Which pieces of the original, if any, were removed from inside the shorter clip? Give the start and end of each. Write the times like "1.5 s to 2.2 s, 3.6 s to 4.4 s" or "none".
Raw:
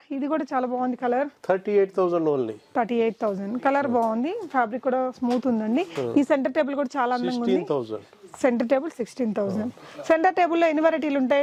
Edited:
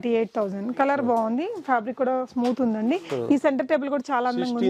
none